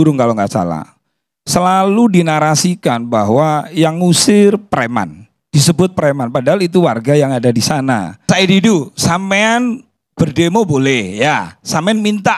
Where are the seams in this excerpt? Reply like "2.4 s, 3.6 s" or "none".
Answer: 8.2 s